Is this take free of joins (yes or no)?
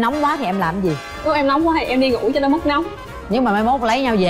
no